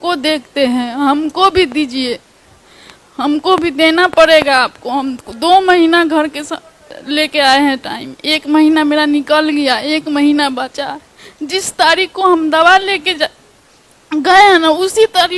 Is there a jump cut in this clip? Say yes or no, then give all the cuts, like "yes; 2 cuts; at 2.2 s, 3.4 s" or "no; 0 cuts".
no; 0 cuts